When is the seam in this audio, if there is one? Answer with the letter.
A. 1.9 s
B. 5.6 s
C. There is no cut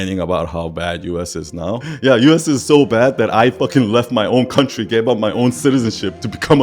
A